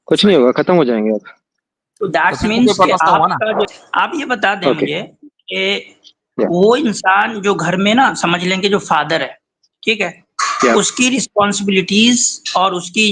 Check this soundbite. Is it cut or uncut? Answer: cut